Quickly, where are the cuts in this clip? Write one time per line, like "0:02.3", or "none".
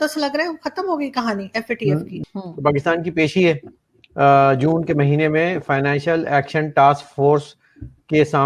0:02.2